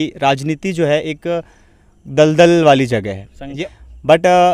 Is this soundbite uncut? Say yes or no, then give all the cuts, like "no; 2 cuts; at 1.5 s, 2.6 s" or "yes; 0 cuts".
no; 1 cut; at 3.6 s